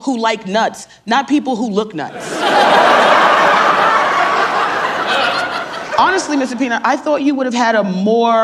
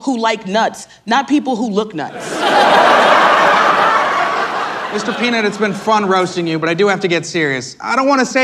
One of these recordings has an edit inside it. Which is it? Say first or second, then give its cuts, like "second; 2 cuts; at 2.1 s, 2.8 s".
second; 1 cut; at 4.8 s